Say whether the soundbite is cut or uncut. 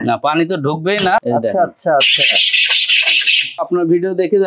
cut